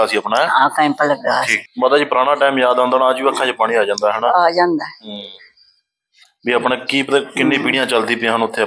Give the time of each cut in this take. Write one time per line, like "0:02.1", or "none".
0:01.6